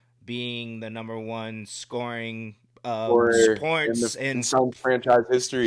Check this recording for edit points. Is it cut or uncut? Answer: uncut